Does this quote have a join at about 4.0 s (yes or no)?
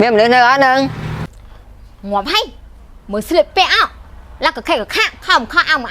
no